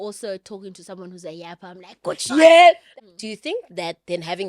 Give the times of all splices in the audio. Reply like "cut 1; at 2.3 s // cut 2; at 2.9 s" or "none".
cut 1; at 2.9 s